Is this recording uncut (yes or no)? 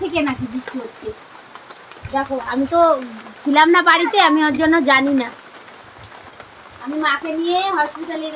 yes